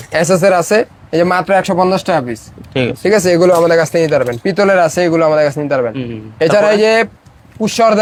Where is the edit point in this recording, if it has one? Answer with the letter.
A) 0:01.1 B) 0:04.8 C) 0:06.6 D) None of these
D